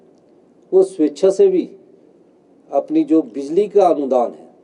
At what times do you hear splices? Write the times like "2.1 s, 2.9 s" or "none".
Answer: none